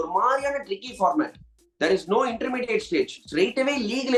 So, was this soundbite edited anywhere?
no; 0 cuts

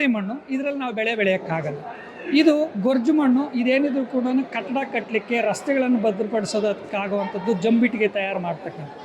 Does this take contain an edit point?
no; 0 cuts

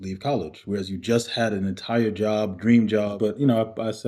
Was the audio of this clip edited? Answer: yes; 1 cut; at 3.1 s

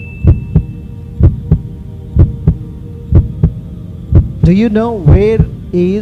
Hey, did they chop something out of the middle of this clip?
no; 0 cuts

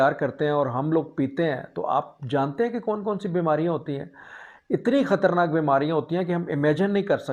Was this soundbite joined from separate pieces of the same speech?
no; 0 cuts

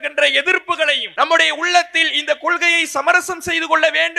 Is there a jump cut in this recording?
yes; 1 cut; at 1.0 s

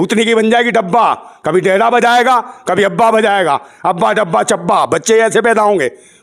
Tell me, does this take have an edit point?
no; 0 cuts

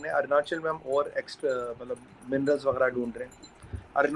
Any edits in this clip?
no; 0 cuts

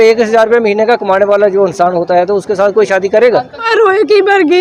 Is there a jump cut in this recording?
yes; 1 cut; at 3.7 s

